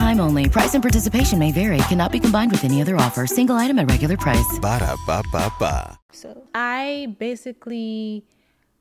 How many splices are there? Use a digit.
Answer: 0